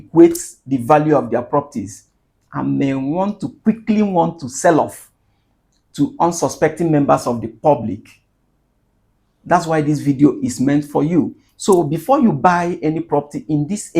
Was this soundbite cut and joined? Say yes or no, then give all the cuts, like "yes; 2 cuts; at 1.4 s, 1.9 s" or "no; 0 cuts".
no; 0 cuts